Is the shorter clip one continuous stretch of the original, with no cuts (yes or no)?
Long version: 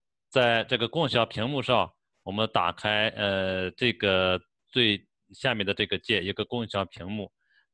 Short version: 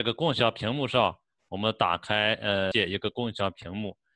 no